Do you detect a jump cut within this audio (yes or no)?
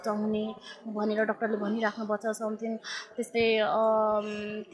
no